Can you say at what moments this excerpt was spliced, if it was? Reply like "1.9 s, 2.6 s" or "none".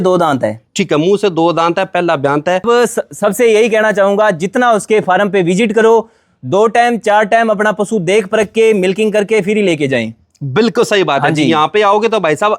2.6 s